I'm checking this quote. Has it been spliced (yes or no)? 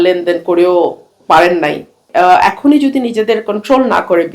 yes